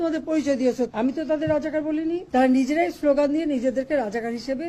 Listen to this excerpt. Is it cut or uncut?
cut